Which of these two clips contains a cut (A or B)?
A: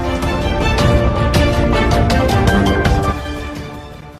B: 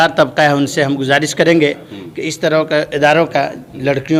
A